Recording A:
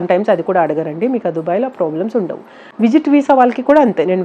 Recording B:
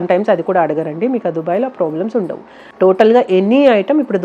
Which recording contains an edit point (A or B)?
B